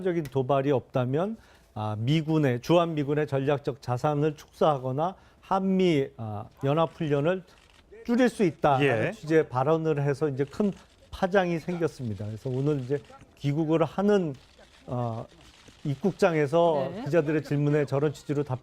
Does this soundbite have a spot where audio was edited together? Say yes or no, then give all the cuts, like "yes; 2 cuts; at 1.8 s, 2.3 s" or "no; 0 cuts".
yes; 1 cut; at 8.5 s